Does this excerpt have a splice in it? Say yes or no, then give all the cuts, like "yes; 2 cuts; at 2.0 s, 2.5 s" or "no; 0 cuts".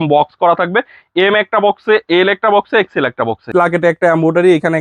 yes; 1 cut; at 3.4 s